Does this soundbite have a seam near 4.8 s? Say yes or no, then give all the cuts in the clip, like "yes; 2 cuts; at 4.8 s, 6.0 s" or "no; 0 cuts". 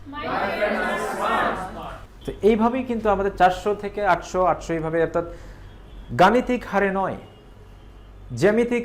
no; 1 cut; at 1.9 s